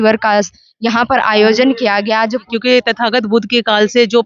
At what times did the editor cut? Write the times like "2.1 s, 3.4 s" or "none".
2.5 s

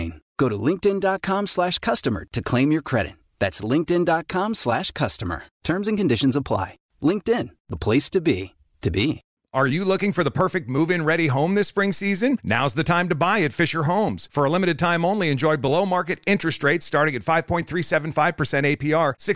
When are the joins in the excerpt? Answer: 9.3 s

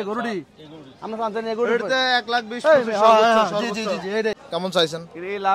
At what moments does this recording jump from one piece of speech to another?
4.4 s

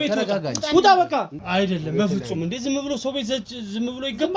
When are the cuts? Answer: 1.4 s

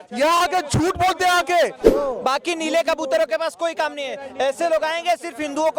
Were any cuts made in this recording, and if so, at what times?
1.8 s

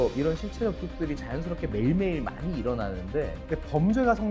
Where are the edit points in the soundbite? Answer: 3.4 s

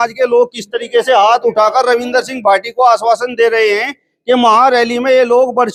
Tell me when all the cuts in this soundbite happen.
none

